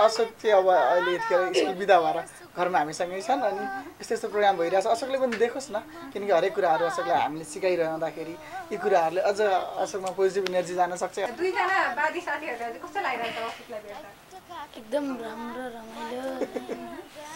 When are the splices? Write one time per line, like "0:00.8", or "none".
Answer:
0:11.3